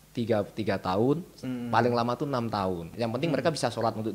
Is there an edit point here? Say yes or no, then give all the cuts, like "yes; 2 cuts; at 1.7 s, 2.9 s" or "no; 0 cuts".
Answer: yes; 1 cut; at 2.9 s